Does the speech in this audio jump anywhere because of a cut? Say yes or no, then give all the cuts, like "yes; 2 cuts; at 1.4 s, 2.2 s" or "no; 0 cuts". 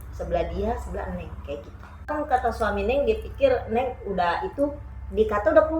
yes; 1 cut; at 2.1 s